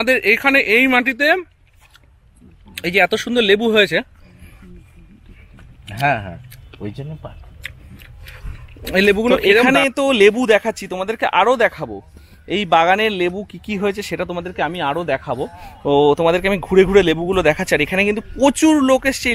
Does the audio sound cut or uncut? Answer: cut